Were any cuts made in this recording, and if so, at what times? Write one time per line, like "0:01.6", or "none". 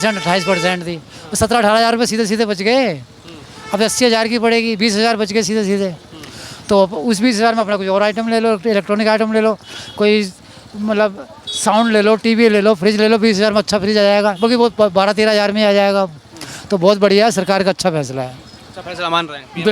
none